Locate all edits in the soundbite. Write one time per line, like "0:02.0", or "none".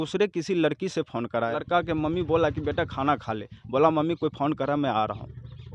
0:01.5